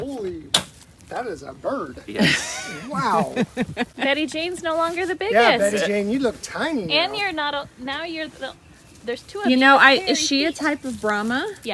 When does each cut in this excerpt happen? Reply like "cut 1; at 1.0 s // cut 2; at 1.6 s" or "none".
none